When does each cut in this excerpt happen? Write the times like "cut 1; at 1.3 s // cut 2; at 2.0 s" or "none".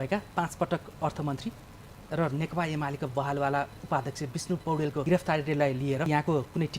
cut 1; at 5.0 s // cut 2; at 6.1 s